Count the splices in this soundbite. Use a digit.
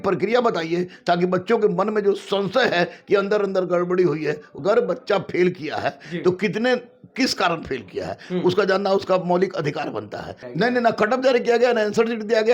2